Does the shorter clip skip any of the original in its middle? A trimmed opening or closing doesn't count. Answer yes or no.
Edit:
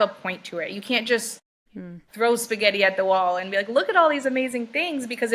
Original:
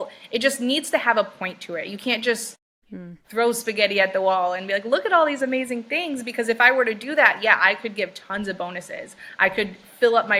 no